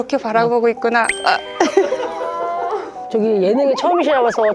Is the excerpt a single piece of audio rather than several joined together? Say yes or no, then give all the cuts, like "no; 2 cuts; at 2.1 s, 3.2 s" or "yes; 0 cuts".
no; 2 cuts; at 1.1 s, 3.1 s